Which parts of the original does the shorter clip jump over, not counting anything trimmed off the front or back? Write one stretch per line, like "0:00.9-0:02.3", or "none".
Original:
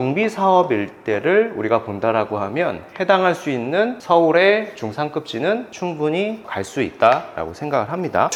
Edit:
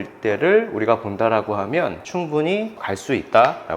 0:02.9-0:05.7